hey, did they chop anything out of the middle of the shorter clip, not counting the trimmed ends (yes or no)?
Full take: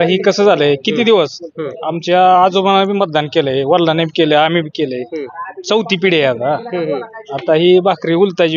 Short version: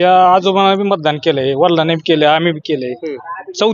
no